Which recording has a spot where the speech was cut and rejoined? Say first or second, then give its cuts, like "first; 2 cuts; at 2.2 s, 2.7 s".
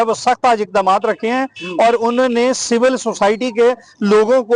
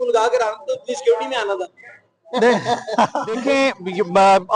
second; 1 cut; at 3.4 s